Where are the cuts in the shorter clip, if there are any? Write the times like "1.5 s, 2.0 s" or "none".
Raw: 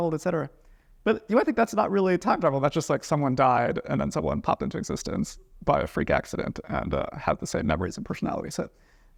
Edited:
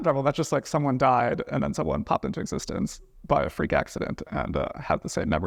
none

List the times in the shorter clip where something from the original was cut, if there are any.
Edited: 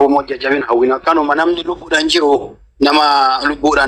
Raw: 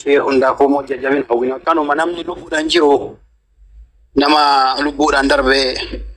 2.6 s

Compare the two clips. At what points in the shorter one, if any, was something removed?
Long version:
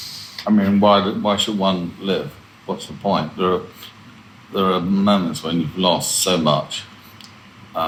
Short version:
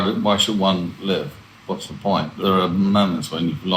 2.3 s

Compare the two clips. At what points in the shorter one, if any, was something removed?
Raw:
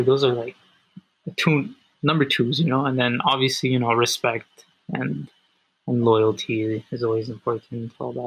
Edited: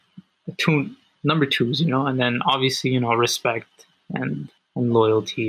4.6 s

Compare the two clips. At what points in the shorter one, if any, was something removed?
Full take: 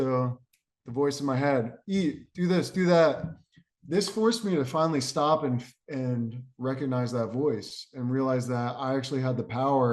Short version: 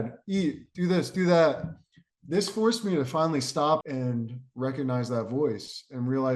3.8 s

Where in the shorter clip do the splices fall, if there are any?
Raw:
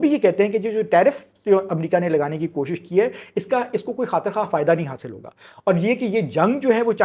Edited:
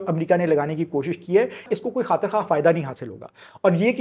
1.6 s

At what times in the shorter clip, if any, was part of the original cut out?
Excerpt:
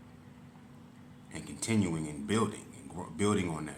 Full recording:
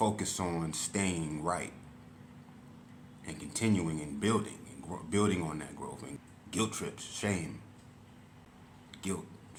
none

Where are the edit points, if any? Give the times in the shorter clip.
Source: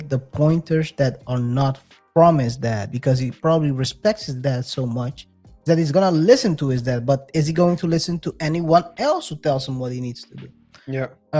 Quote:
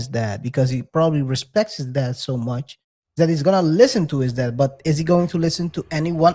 none

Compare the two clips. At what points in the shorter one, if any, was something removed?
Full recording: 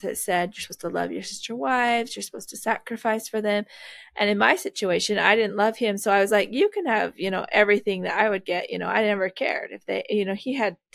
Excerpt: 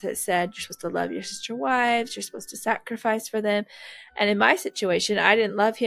none

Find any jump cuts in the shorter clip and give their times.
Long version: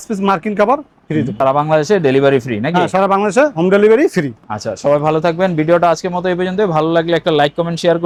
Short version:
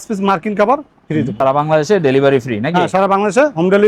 none

